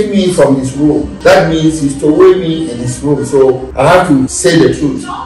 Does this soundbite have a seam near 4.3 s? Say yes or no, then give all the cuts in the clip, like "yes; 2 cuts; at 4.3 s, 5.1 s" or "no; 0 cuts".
yes; 3 cuts; at 1.1 s, 3.7 s, 4.3 s